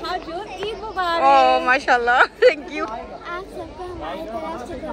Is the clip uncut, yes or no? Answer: no